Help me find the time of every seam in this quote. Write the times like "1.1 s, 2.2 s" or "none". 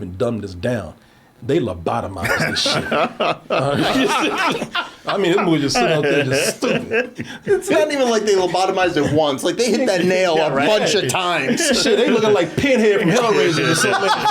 7.2 s